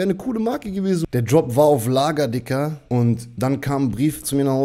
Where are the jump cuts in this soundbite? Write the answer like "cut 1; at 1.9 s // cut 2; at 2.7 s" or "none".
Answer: cut 1; at 1.0 s // cut 2; at 2.8 s